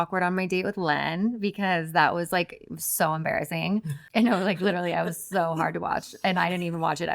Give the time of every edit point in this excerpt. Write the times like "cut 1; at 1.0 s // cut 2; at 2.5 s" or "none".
cut 1; at 4.0 s